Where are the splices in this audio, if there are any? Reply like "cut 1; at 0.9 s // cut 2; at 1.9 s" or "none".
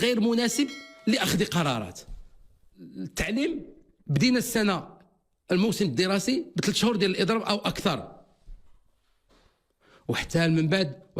cut 1; at 3.0 s